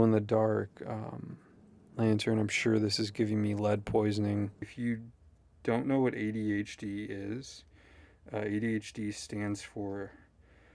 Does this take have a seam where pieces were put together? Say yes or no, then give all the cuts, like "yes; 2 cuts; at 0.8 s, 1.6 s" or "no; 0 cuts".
yes; 1 cut; at 4.6 s